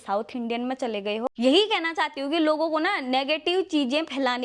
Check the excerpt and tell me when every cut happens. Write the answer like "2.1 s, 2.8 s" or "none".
1.3 s